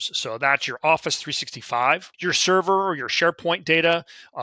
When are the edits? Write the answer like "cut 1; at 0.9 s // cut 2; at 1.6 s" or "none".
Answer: cut 1; at 2.1 s